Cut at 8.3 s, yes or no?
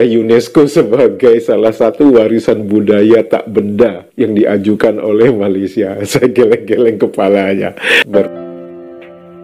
yes